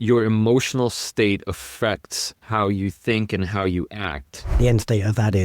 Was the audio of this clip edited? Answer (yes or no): yes